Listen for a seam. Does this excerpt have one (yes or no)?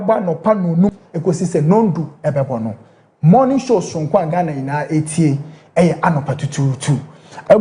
yes